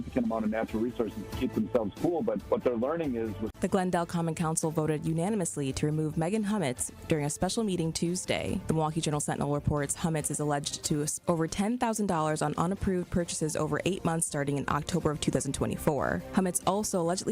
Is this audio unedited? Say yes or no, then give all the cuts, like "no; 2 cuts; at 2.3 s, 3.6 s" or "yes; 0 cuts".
no; 1 cut; at 3.5 s